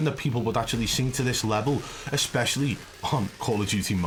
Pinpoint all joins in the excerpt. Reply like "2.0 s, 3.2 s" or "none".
none